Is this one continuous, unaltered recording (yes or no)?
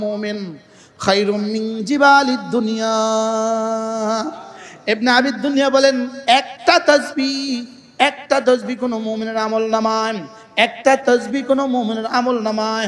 yes